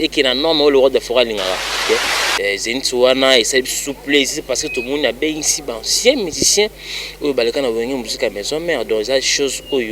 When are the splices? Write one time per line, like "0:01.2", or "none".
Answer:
0:01.8